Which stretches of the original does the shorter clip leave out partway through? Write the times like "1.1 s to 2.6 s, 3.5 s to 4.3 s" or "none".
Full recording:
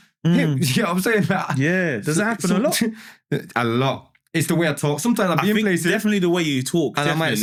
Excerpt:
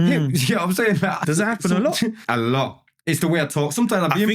1.5 s to 2.0 s, 3.0 s to 3.5 s